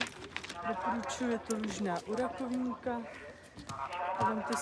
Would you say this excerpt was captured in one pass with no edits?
yes; 0 cuts

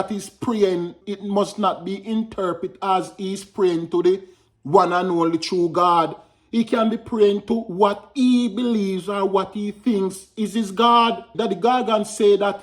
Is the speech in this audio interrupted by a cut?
yes; 2 cuts; at 1.0 s, 11.3 s

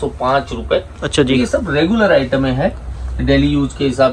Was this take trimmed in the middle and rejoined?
no; 0 cuts

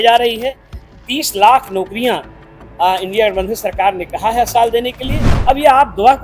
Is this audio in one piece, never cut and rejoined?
no; 1 cut; at 5.3 s

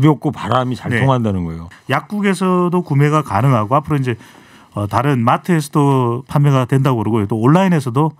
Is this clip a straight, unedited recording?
no; 1 cut; at 1.6 s

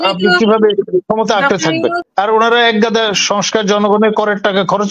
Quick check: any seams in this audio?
yes; 1 cut; at 2.0 s

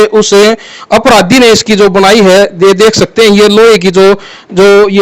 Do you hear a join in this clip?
no; 0 cuts

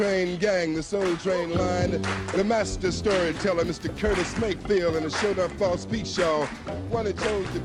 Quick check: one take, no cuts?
yes; 0 cuts

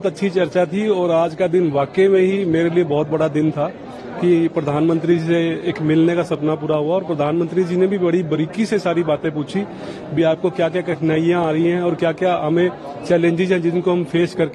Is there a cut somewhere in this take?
no; 0 cuts

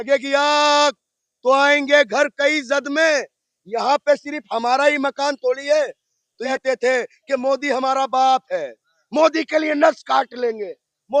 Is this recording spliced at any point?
yes; 1 cut; at 6.4 s

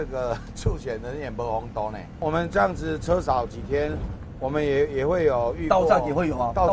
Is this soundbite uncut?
no; 1 cut; at 2.1 s

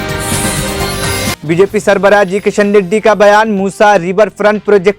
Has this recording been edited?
yes; 1 cut; at 1.4 s

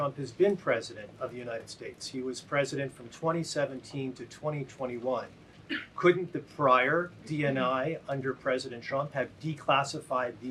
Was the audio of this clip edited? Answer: no; 0 cuts

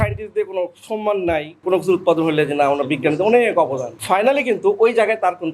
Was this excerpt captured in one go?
no; 2 cuts; at 1.6 s, 4.0 s

